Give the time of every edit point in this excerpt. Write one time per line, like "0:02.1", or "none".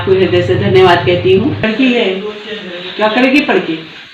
0:01.7